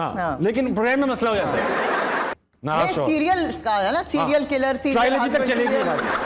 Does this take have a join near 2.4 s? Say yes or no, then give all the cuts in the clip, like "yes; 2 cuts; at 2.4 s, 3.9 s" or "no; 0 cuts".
yes; 1 cut; at 2.4 s